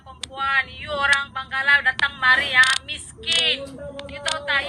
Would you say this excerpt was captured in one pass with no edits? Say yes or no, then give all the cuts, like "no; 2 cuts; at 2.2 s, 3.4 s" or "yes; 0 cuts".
yes; 0 cuts